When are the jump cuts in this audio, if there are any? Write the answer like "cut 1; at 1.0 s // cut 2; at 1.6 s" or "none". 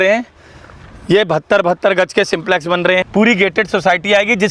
cut 1; at 3.0 s